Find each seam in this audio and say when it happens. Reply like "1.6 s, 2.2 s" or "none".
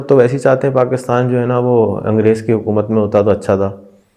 none